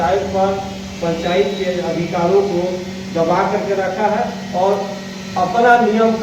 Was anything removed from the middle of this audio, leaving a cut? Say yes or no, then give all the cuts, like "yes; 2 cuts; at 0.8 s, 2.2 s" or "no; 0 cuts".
no; 0 cuts